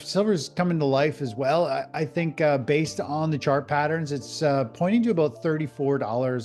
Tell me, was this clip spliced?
no; 0 cuts

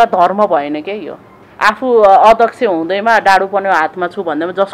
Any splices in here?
no; 0 cuts

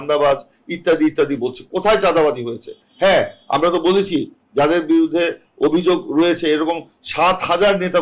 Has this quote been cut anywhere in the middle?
no; 0 cuts

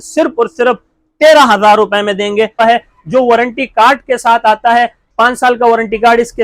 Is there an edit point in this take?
yes; 1 cut; at 2.6 s

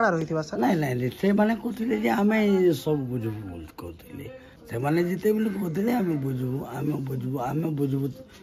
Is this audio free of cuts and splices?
no; 1 cut; at 4.5 s

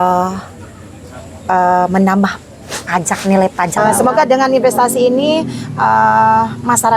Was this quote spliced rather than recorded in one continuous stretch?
yes; 1 cut; at 3.8 s

